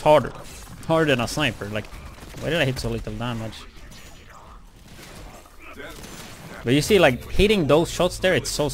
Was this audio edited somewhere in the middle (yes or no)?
yes